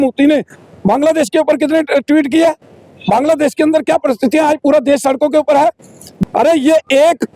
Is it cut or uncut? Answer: cut